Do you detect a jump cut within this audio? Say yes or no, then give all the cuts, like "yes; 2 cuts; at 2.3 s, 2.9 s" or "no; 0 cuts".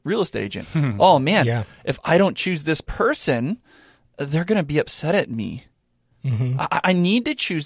no; 0 cuts